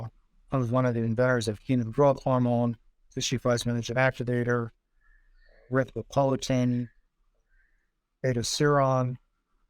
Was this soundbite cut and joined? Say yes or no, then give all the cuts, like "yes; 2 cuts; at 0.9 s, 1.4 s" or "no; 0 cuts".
no; 0 cuts